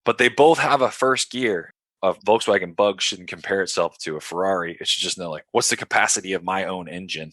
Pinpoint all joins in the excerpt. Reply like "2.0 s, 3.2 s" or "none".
1.9 s